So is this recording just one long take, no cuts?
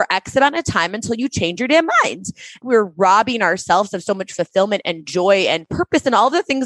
no; 2 cuts; at 2.5 s, 5.7 s

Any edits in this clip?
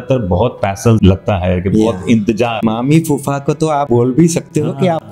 yes; 3 cuts; at 1.0 s, 2.6 s, 3.9 s

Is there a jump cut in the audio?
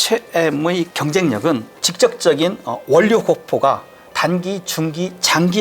yes; 2 cuts; at 0.9 s, 1.8 s

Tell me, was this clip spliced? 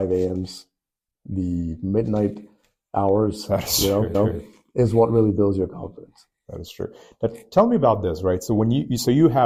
no; 0 cuts

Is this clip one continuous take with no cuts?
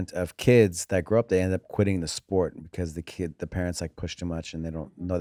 yes; 0 cuts

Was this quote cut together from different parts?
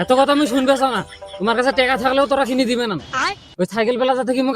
no; 0 cuts

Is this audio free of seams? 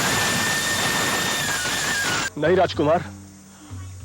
no; 1 cut; at 2.3 s

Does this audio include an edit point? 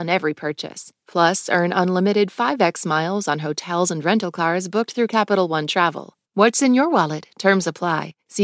yes; 1 cut; at 6.1 s

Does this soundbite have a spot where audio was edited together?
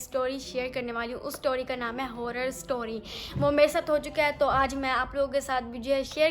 yes; 1 cut; at 2.9 s

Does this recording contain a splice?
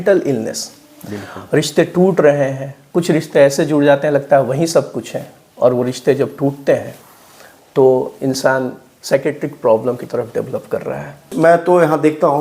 yes; 1 cut; at 11.3 s

